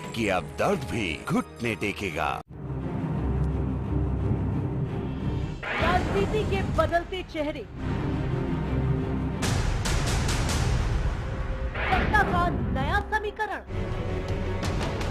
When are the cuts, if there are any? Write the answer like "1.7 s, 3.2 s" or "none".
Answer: 2.3 s